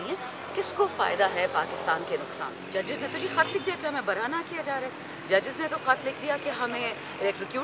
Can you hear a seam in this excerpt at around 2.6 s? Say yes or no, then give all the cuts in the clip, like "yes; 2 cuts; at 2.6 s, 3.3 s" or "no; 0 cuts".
yes; 1 cut; at 2.6 s